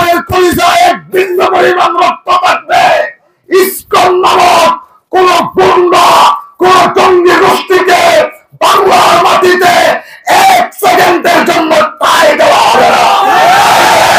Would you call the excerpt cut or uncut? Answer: uncut